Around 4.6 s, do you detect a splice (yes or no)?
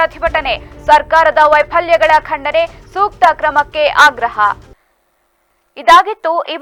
no